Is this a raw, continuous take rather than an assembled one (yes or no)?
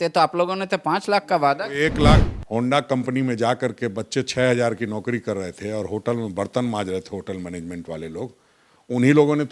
no